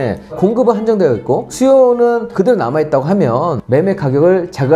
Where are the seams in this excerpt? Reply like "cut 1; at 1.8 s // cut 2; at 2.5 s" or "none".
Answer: cut 1; at 3.6 s